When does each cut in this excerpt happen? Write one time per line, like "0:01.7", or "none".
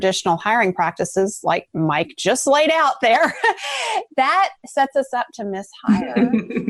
none